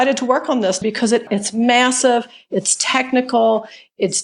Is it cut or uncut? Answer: cut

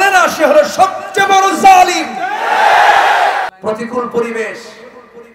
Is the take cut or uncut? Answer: cut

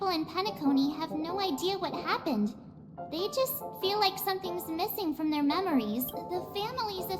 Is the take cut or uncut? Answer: cut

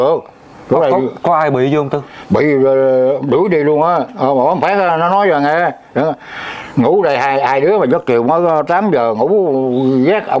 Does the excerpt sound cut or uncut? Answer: uncut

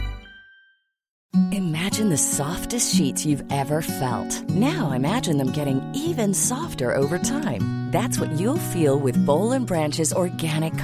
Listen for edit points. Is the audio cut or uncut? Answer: cut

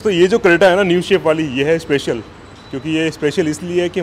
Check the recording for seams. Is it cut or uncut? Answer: uncut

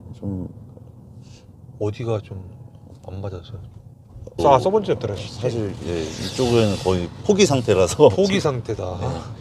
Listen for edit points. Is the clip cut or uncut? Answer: cut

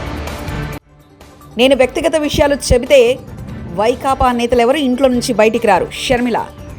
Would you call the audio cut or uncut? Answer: cut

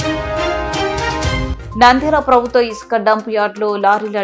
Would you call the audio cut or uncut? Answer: cut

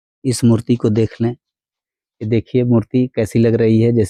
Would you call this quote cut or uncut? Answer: uncut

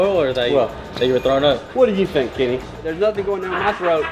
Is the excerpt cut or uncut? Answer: cut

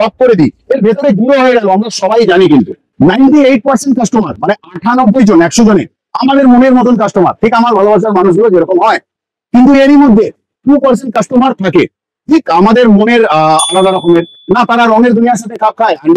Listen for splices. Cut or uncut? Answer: cut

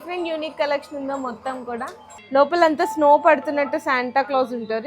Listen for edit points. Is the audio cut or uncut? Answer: cut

